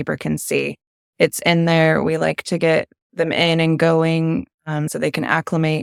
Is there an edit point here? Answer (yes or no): no